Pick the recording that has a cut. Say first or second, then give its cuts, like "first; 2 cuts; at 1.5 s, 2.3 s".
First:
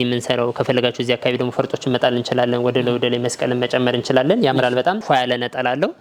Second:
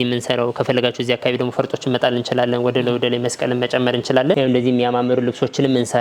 second; 1 cut; at 4.3 s